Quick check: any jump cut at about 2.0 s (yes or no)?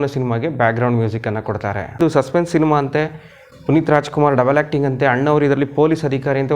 yes